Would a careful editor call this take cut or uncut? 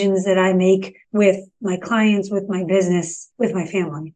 cut